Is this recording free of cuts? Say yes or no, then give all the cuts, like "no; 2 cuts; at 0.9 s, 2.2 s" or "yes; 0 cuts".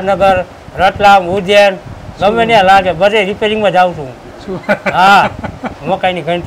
yes; 0 cuts